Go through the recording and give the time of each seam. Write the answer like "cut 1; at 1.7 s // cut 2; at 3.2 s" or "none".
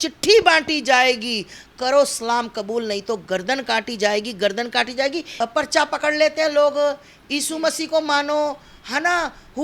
cut 1; at 5.2 s